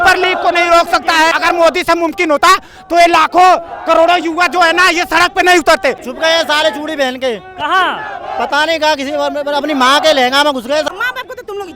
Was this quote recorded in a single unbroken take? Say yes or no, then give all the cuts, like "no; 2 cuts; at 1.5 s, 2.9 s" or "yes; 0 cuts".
no; 3 cuts; at 1.3 s, 6.0 s, 10.9 s